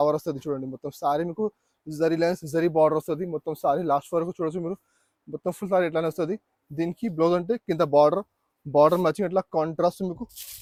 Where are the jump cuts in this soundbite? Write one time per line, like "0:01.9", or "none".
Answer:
none

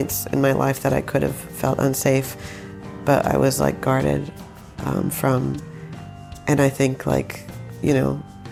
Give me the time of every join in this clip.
none

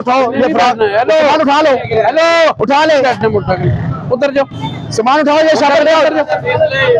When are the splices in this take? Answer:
none

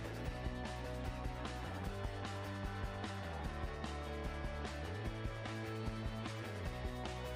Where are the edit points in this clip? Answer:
none

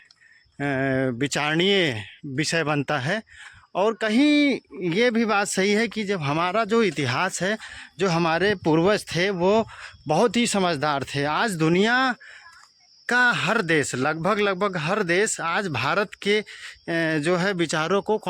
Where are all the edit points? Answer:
none

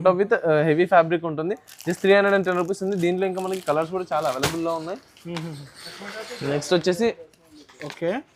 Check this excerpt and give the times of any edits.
none

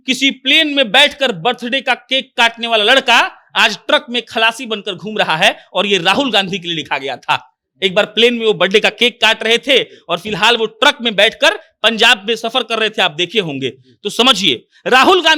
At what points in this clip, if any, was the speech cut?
none

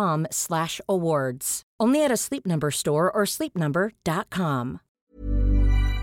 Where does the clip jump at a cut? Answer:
0:04.9

